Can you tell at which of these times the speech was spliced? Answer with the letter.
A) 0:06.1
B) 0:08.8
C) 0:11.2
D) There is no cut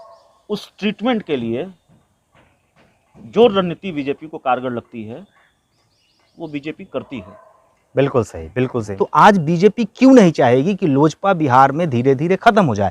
B